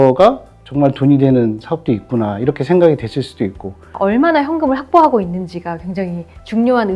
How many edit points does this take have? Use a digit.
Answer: 1